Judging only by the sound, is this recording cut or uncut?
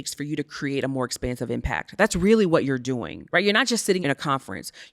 cut